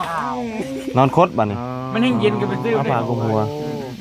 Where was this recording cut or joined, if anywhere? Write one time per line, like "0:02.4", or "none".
0:02.8